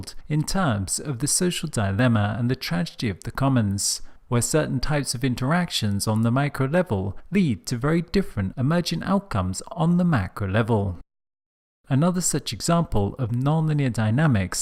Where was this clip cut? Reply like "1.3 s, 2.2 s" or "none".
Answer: none